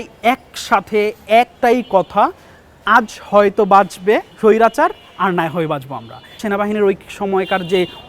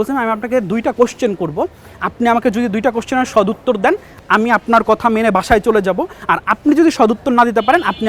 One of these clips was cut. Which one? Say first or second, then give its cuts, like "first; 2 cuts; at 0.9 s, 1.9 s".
first; 3 cuts; at 1.5 s, 4.3 s, 6.4 s